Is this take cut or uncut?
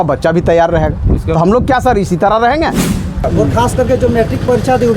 cut